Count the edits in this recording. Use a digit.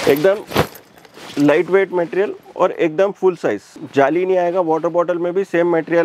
1